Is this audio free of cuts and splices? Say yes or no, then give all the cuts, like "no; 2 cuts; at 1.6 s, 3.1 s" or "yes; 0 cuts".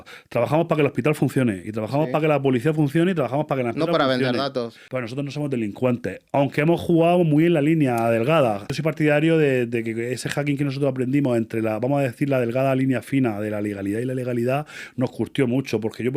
no; 2 cuts; at 4.8 s, 8.6 s